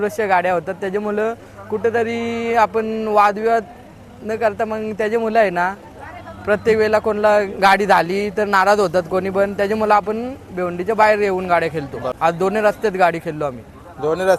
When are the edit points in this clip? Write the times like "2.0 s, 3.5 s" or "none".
12.0 s